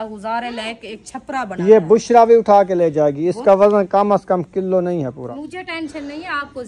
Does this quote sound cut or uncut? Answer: cut